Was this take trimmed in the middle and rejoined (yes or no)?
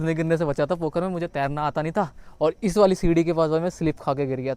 no